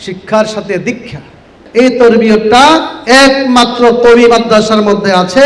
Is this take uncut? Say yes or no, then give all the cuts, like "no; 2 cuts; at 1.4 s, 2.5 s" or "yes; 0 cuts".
no; 1 cut; at 1.5 s